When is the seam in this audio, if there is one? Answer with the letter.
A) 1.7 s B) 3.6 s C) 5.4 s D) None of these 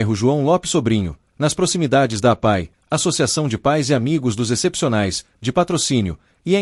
D